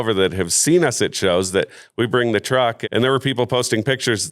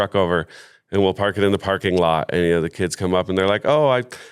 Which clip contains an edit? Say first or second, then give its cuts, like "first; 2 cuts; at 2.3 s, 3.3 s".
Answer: first; 1 cut; at 2.8 s